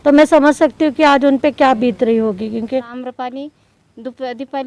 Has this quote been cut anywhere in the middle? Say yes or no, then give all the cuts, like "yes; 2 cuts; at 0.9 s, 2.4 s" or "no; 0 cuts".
yes; 1 cut; at 3.0 s